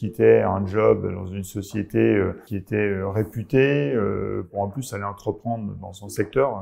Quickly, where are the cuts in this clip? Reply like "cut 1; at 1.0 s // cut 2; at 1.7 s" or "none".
cut 1; at 2.5 s // cut 2; at 4.5 s